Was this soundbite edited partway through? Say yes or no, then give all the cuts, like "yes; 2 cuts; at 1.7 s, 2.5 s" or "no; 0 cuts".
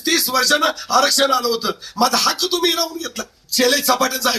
yes; 1 cut; at 3.4 s